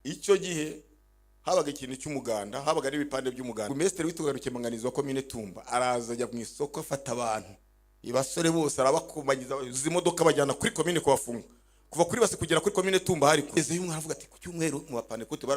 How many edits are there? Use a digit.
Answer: 2